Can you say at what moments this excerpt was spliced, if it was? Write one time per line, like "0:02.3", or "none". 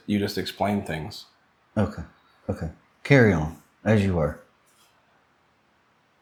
none